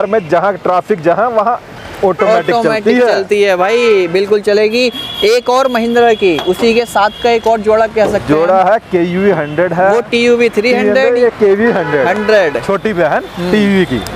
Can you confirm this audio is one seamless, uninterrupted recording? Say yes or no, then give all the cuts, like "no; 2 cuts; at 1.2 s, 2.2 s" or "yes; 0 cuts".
yes; 0 cuts